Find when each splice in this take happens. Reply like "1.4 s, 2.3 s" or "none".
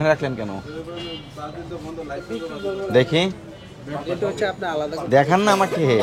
none